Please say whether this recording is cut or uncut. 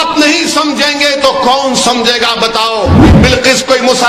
cut